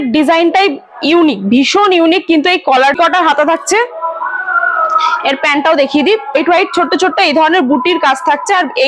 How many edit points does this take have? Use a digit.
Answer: 2